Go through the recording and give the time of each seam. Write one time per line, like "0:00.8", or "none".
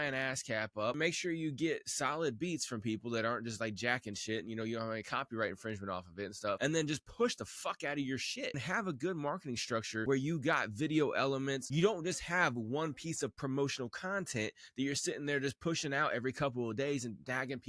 0:01.0
0:06.6
0:08.6
0:10.0
0:11.7